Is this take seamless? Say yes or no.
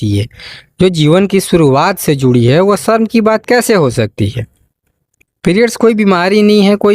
no